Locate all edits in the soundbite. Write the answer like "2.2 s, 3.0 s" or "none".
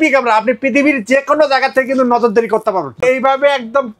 3.0 s